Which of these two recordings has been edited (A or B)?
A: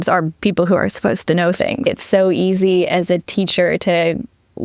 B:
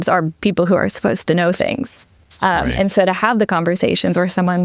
A